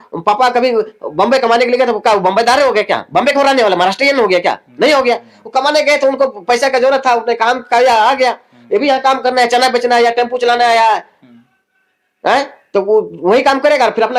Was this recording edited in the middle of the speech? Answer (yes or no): no